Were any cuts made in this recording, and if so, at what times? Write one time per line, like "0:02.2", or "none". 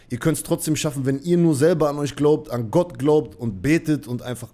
none

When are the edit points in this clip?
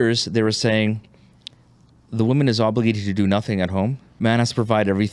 0:04.0

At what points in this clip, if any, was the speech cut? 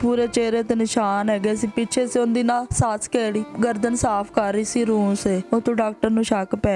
0:03.5
0:05.4

